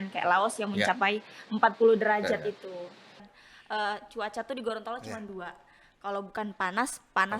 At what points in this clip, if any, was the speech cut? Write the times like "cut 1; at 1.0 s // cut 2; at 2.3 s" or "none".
cut 1; at 3.1 s

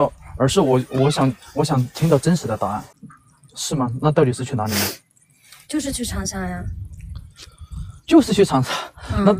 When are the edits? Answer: cut 1; at 2.8 s

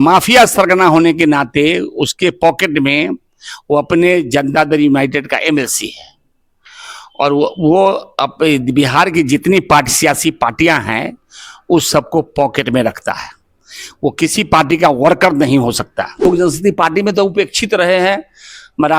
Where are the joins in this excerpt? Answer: cut 1; at 16.2 s

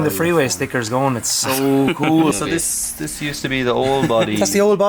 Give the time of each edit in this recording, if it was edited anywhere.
cut 1; at 2.3 s

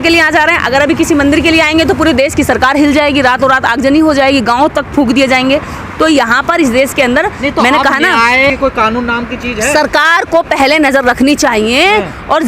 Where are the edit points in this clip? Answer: none

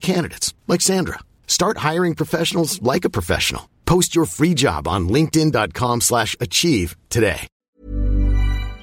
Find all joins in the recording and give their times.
cut 1; at 7.5 s

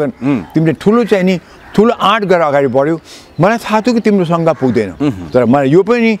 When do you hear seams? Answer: none

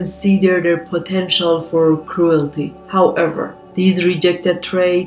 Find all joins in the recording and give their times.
none

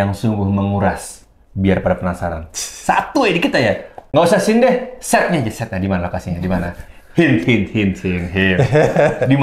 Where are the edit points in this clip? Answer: none

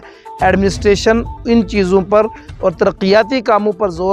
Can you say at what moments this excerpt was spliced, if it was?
none

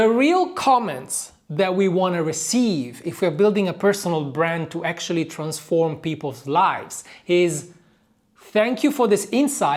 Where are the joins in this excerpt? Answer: none

